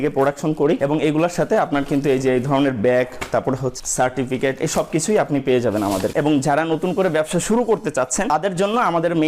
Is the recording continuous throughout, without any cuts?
no; 1 cut; at 6.1 s

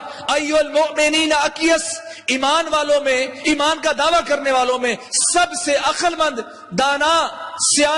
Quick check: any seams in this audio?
no; 0 cuts

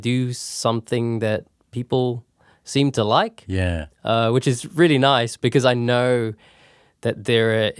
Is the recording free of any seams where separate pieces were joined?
yes; 0 cuts

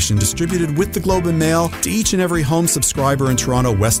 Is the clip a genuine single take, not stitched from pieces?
yes; 0 cuts

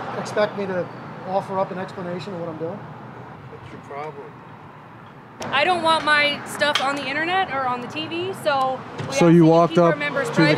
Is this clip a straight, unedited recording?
no; 2 cuts; at 3.4 s, 5.4 s

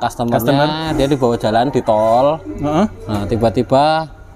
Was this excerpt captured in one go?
yes; 0 cuts

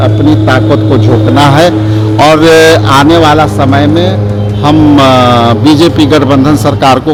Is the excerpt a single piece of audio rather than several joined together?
yes; 0 cuts

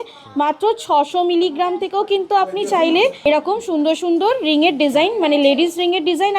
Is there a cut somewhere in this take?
yes; 1 cut; at 3.2 s

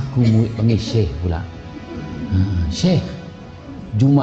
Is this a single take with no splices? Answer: yes; 0 cuts

